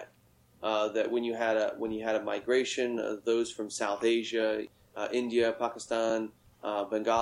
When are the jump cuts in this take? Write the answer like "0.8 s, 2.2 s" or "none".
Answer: 4.8 s